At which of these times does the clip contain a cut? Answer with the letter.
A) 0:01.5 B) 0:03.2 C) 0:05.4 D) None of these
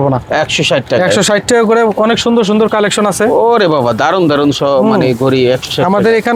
D